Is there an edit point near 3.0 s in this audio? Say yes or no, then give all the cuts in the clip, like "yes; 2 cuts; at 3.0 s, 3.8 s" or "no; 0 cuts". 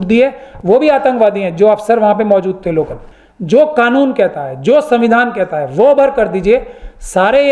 yes; 1 cut; at 3.0 s